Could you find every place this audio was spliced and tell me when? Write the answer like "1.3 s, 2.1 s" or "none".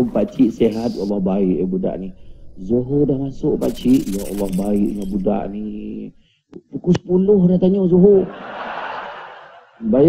none